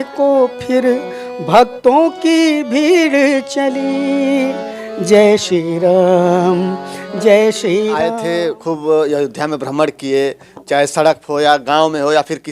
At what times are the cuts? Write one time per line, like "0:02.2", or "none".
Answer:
0:08.1